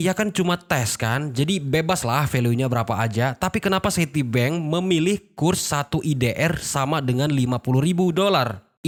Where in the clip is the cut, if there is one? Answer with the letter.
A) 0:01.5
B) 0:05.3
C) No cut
C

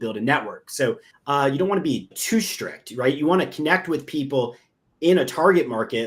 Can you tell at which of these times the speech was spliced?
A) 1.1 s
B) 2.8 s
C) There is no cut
A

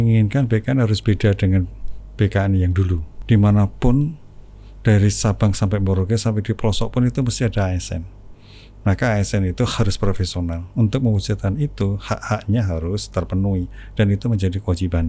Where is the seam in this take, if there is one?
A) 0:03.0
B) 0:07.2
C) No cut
A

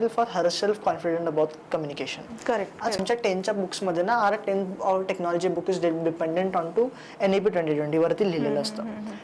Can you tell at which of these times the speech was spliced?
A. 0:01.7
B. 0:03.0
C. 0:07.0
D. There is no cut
B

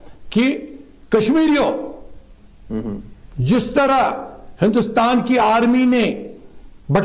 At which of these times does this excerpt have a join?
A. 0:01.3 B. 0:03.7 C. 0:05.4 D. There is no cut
B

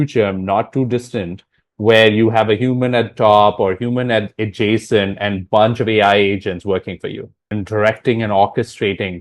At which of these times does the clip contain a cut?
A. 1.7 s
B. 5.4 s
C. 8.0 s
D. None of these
D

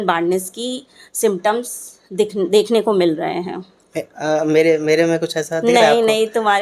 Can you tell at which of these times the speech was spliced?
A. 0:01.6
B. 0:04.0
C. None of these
C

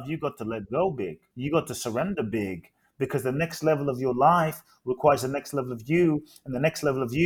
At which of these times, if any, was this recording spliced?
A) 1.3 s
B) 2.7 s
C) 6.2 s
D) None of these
A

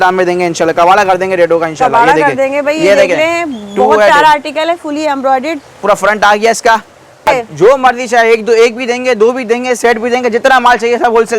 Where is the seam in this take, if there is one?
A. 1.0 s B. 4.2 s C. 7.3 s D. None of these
C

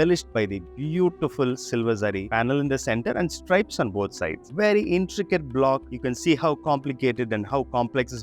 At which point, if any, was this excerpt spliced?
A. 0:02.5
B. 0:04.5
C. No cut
B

